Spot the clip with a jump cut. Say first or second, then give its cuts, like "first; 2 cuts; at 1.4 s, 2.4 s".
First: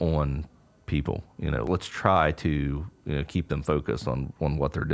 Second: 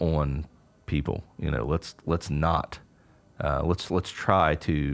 first; 1 cut; at 1.7 s